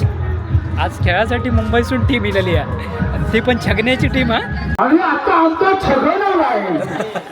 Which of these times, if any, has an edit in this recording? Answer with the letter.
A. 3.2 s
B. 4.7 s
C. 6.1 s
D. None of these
B